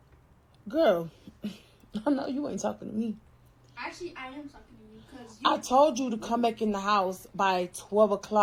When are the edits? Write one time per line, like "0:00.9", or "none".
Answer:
none